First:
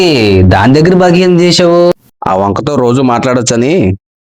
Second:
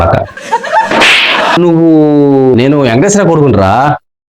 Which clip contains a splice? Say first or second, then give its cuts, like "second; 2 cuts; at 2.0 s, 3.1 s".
second; 1 cut; at 1.6 s